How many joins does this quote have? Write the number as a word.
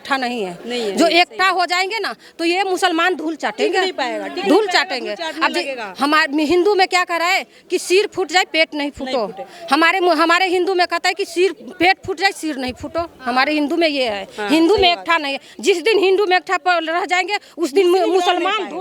zero